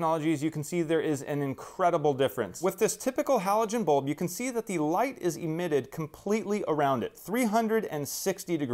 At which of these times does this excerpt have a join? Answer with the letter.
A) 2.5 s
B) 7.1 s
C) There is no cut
A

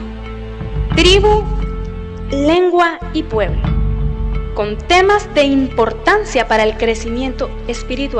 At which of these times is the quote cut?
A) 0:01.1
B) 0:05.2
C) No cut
B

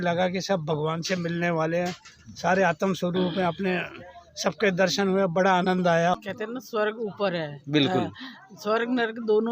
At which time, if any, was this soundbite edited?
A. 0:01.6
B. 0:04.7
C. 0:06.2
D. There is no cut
C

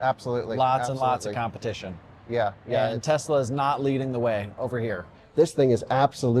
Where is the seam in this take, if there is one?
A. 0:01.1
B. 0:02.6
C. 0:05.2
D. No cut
C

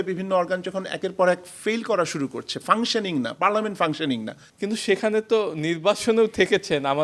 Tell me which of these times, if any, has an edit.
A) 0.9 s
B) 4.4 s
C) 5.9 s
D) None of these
B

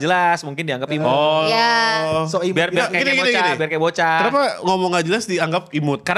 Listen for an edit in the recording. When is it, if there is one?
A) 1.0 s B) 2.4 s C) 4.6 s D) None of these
D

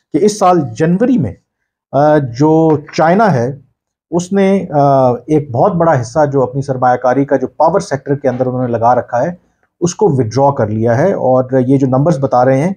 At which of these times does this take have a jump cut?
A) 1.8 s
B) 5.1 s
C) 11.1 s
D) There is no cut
D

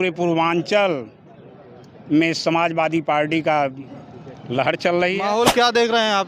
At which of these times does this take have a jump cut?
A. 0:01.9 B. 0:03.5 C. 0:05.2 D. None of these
C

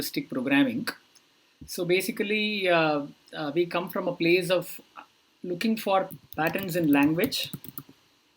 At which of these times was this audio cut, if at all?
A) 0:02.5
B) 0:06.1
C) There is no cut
B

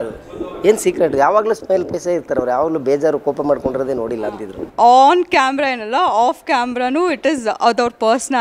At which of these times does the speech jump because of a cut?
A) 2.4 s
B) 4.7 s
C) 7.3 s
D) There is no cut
B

